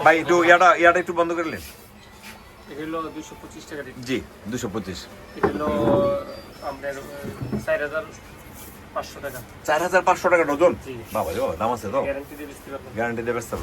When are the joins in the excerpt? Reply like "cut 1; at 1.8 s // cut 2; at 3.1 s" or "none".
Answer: none